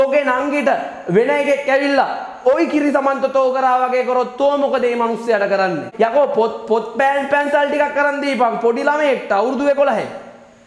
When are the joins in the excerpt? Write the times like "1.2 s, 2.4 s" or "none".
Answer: 5.9 s